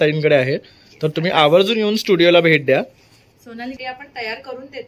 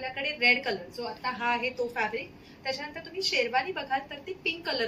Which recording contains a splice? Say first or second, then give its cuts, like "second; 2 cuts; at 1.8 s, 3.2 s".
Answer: first; 1 cut; at 3.8 s